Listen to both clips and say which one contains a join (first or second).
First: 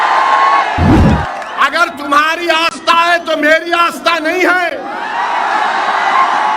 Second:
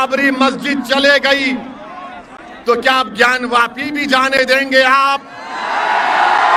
first